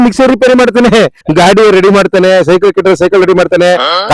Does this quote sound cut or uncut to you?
cut